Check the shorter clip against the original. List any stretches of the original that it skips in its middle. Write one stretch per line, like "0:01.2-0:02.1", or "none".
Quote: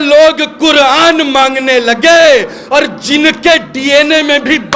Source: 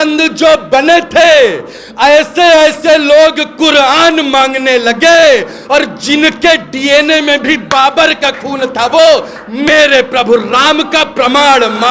none